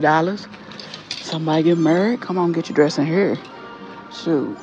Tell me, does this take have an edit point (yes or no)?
no